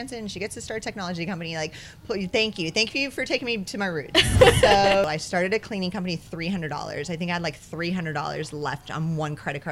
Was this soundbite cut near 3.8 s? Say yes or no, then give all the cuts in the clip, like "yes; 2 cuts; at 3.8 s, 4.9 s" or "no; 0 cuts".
no; 1 cut; at 5.0 s